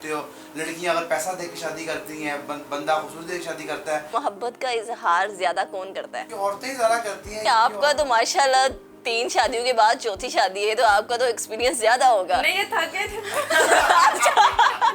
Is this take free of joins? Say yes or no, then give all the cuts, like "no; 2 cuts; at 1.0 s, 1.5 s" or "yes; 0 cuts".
no; 2 cuts; at 4.1 s, 7.4 s